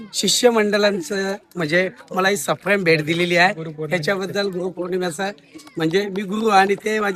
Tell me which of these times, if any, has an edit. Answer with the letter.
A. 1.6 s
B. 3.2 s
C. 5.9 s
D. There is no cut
D